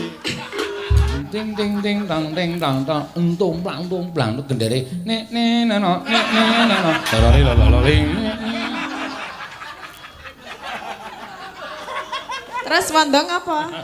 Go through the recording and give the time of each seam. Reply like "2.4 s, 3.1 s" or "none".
1.1 s